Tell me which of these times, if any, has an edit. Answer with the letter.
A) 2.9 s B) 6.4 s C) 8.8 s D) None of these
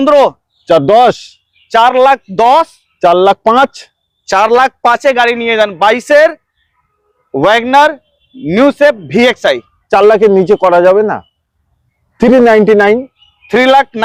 D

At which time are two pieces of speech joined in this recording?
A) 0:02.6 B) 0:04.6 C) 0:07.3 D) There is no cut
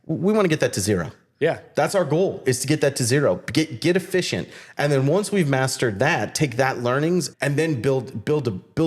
C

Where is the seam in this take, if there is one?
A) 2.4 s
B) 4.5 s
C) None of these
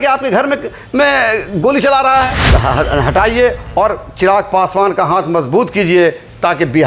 A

